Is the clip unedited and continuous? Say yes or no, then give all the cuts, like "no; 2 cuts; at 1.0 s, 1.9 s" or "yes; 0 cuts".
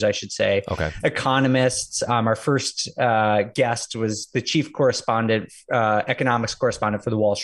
yes; 0 cuts